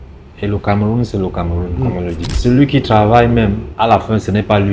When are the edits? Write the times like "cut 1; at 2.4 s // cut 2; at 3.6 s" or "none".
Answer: cut 1; at 2.3 s // cut 2; at 3.7 s